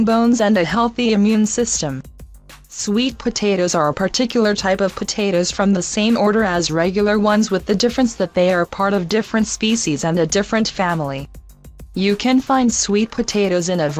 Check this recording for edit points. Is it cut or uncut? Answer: cut